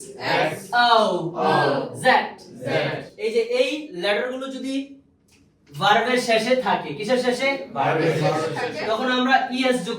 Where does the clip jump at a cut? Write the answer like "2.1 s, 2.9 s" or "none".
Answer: 3.0 s